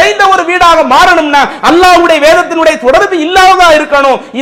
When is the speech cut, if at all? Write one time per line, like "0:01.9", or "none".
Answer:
none